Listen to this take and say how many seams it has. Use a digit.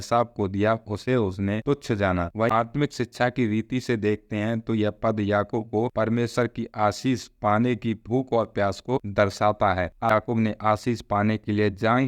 2